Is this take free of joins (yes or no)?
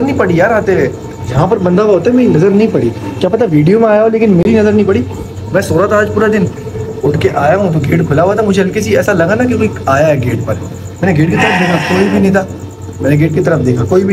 yes